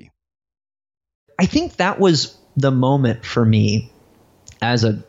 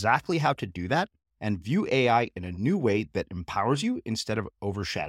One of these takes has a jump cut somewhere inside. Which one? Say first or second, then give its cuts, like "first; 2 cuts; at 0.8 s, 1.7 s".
first; 1 cut; at 1.3 s